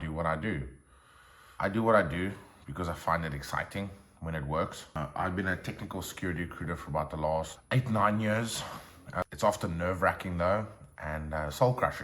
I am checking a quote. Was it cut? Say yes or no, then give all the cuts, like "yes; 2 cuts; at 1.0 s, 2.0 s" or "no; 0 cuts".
yes; 4 cuts; at 1.5 s, 5.0 s, 7.6 s, 9.2 s